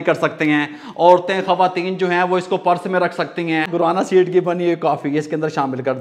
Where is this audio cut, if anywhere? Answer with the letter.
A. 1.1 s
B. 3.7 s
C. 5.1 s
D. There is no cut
B